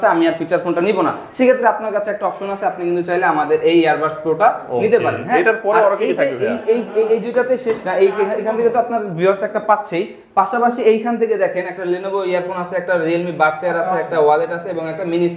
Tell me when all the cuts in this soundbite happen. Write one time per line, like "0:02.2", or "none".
none